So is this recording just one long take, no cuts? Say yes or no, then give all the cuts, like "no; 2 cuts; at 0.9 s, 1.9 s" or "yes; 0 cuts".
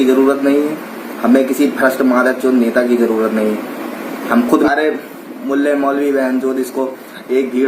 no; 1 cut; at 4.7 s